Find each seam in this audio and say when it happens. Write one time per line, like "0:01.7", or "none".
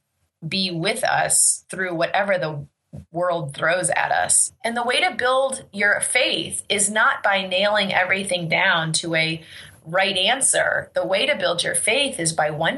0:04.4